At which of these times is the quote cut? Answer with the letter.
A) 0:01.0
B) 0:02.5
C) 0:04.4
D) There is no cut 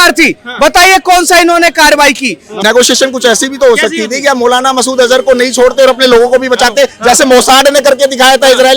B